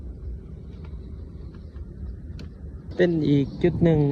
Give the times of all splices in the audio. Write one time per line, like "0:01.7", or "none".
0:02.9